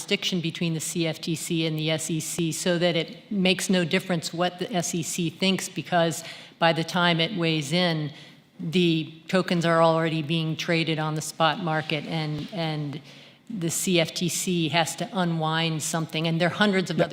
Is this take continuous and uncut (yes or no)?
yes